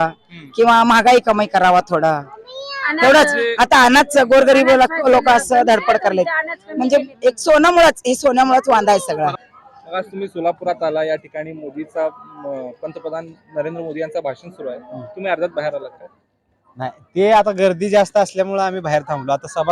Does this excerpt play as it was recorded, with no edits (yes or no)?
yes